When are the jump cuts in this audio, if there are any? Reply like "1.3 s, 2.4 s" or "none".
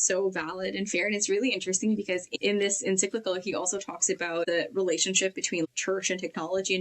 2.3 s, 4.5 s, 5.7 s

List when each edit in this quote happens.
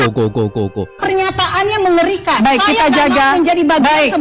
0.9 s

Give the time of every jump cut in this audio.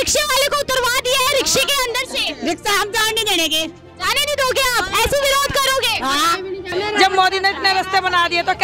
6.7 s

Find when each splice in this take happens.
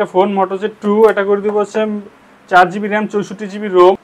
none

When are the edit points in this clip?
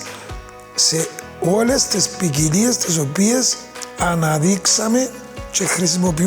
1.2 s

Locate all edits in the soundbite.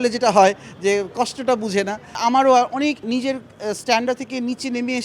2.2 s, 3.0 s

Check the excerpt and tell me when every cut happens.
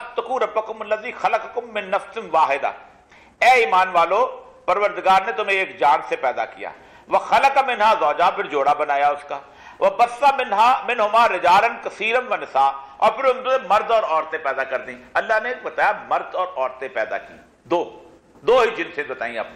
none

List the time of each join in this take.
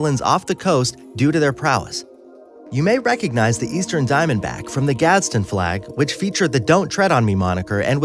6.2 s

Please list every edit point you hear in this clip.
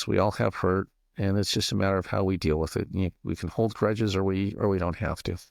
none

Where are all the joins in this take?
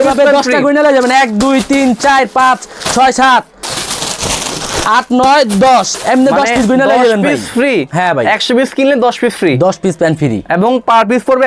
none

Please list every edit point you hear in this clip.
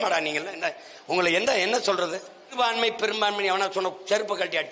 2.5 s

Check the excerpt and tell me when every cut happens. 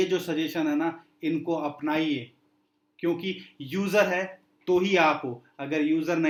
none

